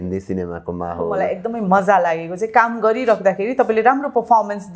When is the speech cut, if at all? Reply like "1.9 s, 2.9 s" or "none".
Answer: 1.3 s